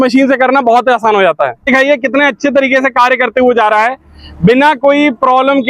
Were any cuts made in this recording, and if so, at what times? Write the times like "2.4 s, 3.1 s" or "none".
1.7 s